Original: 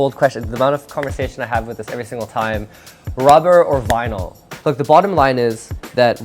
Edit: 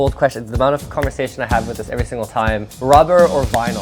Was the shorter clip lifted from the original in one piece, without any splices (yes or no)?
no